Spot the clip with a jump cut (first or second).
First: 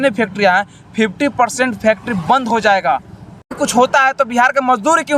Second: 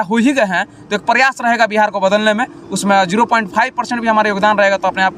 first